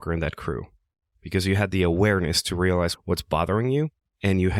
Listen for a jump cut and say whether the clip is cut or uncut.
cut